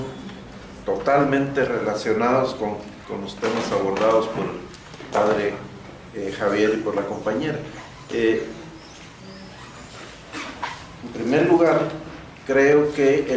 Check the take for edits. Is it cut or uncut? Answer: uncut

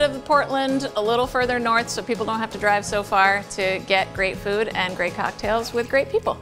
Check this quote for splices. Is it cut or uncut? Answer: uncut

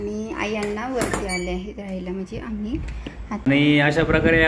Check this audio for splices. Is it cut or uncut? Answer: cut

